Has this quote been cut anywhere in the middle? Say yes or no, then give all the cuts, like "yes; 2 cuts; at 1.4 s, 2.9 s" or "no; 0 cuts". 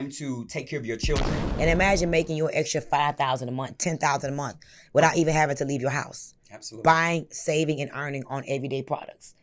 yes; 1 cut; at 1.4 s